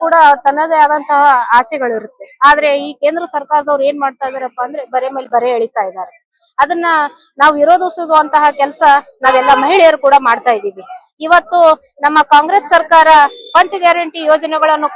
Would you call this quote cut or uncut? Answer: uncut